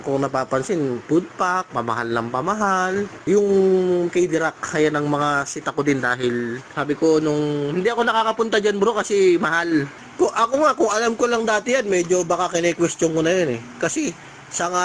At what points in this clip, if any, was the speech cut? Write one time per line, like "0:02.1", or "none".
0:01.0
0:03.1
0:06.6
0:10.0